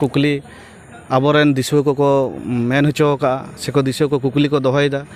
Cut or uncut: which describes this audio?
uncut